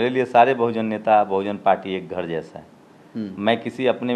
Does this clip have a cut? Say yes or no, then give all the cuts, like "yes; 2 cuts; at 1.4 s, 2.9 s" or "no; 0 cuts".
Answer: no; 0 cuts